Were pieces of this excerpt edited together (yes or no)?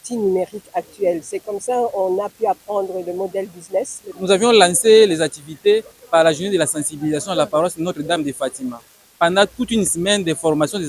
yes